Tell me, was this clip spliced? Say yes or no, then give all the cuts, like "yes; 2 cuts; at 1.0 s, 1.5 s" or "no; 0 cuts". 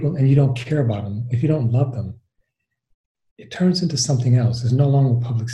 no; 0 cuts